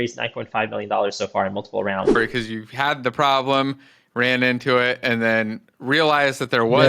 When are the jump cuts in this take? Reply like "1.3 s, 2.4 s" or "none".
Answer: 2.1 s